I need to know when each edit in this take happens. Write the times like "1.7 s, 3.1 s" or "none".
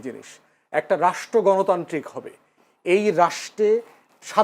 none